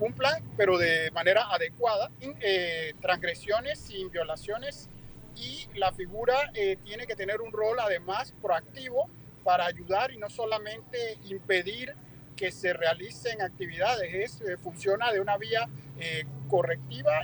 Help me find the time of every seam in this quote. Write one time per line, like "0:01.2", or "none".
0:02.2